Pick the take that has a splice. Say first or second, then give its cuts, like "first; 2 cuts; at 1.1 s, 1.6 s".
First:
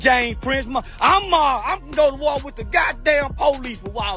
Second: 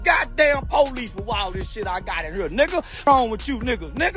second; 1 cut; at 3.1 s